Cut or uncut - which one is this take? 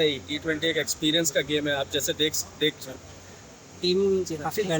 cut